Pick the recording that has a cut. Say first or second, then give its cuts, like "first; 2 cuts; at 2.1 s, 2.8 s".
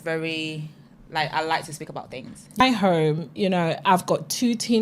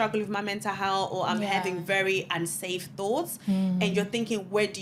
first; 1 cut; at 2.6 s